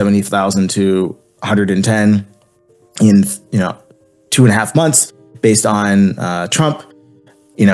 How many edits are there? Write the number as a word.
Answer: zero